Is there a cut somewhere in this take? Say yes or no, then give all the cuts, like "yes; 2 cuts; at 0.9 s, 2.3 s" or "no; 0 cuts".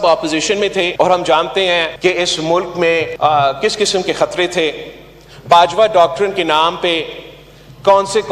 yes; 3 cuts; at 0.9 s, 1.9 s, 3.1 s